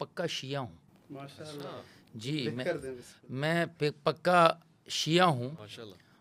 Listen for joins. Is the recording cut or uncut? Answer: uncut